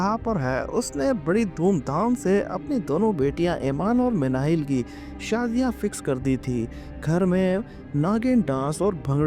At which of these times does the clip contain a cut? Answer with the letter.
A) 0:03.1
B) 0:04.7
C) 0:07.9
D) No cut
D